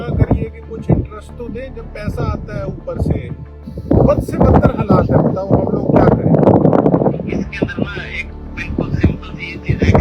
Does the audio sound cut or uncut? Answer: cut